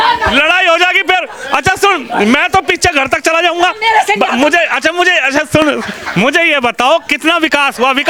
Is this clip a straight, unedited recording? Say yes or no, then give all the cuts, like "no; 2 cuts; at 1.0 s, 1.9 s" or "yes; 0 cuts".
yes; 0 cuts